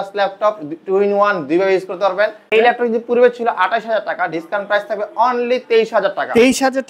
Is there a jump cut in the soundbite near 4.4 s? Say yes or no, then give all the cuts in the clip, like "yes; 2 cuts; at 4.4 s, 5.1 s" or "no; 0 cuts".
no; 1 cut; at 2.4 s